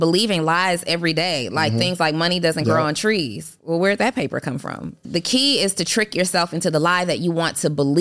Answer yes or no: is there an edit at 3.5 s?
yes